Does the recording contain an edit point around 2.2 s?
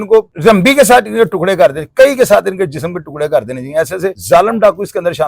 no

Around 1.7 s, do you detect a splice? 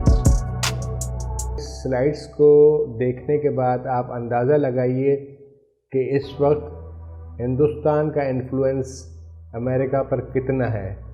yes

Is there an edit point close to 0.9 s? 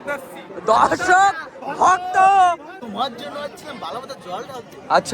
no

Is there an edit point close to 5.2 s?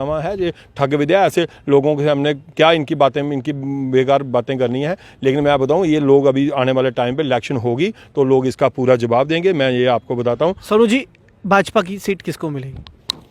no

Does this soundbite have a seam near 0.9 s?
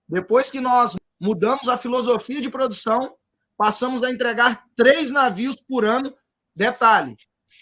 yes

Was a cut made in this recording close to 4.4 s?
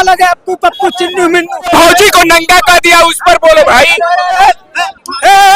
yes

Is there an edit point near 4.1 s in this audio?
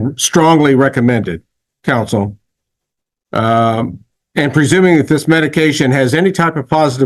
no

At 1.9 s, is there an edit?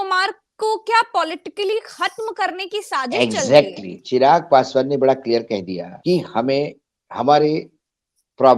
no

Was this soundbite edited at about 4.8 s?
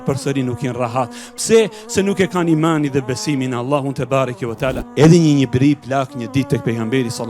yes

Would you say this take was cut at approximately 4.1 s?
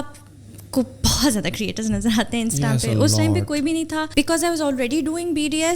yes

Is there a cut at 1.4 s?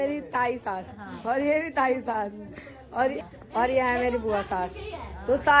no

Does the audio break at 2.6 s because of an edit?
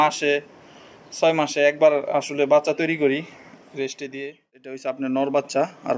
no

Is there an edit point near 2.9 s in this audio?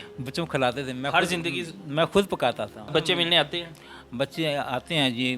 yes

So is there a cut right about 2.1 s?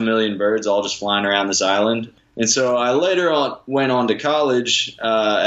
yes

